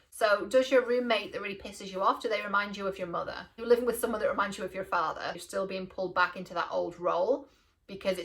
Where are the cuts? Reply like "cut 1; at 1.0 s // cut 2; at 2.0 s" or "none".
cut 1; at 3.5 s // cut 2; at 5.4 s